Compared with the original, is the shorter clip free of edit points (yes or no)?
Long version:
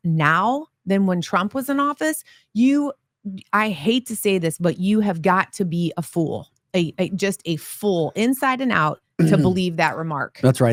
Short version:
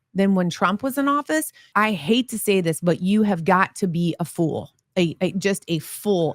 no